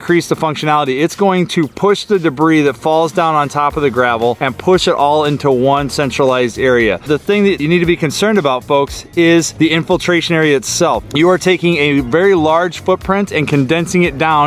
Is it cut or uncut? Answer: uncut